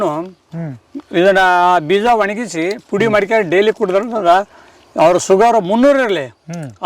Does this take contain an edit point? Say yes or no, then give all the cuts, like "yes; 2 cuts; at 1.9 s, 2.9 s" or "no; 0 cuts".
no; 0 cuts